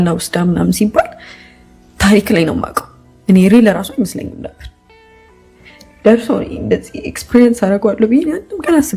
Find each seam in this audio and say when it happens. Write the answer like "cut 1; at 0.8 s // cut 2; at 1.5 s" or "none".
none